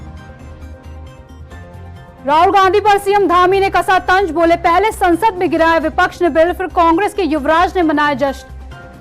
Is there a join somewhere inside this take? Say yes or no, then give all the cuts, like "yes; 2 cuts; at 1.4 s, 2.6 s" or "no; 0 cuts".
yes; 1 cut; at 1.8 s